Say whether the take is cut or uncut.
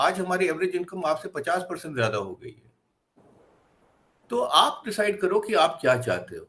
uncut